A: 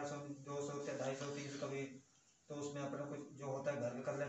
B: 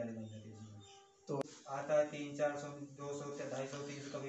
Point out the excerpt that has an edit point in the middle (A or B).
B